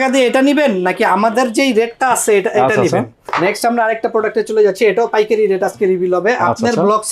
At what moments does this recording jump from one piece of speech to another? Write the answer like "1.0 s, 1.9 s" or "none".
3.2 s